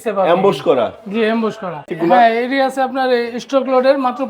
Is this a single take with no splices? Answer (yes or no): no